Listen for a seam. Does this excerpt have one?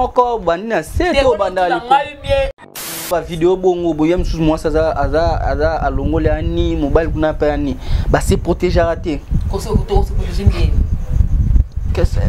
yes; 1 cut; at 2.8 s

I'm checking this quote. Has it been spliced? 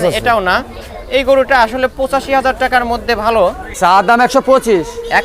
yes; 1 cut; at 3.6 s

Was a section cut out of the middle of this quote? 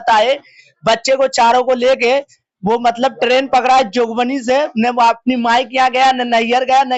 no; 0 cuts

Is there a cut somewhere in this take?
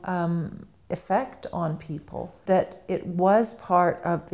yes; 1 cut; at 2.4 s

